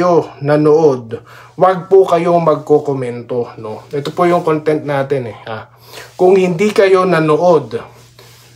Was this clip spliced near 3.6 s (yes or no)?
no